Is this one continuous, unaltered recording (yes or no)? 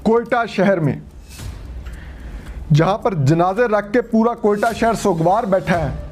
yes